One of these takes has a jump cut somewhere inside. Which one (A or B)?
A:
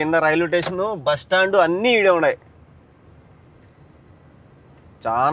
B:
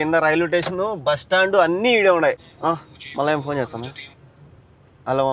B